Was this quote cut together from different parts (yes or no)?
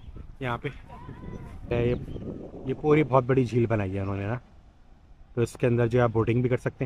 yes